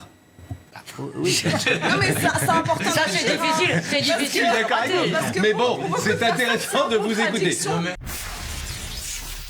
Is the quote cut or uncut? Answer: uncut